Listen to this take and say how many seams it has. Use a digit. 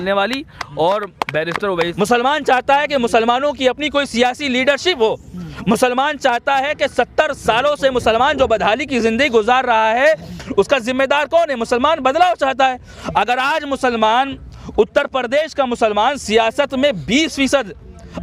1